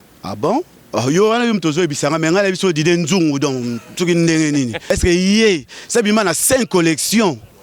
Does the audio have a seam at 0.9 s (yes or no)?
no